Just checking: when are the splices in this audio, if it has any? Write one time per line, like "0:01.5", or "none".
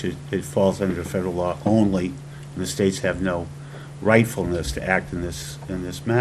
none